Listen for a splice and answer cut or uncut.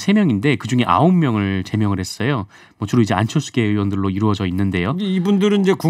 uncut